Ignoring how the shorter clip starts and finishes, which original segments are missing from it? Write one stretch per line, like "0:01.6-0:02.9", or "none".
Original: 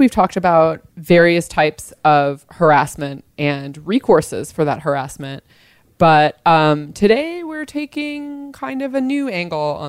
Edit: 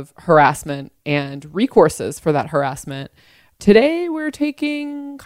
0:05.9-0:06.9